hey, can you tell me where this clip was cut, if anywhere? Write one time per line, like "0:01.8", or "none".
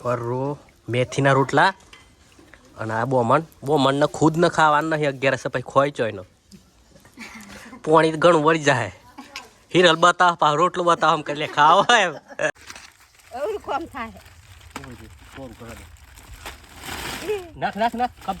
0:12.5